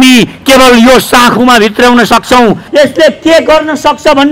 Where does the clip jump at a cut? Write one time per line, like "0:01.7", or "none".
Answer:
0:02.6